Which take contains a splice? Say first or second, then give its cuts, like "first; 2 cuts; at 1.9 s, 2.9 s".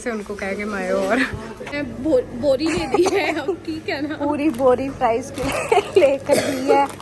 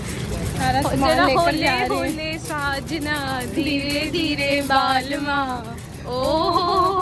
first; 2 cuts; at 1.7 s, 4.4 s